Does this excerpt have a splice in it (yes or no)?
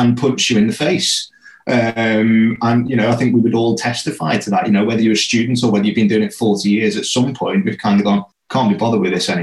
yes